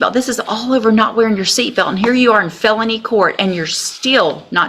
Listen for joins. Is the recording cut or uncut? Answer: uncut